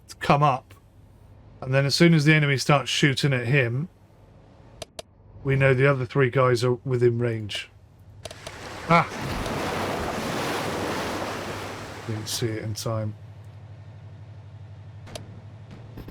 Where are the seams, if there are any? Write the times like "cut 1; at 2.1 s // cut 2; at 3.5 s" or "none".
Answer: cut 1; at 8.1 s